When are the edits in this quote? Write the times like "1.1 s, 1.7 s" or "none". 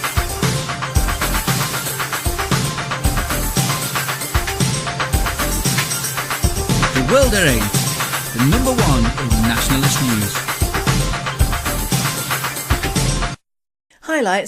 none